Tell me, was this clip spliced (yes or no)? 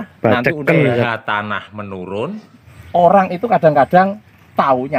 yes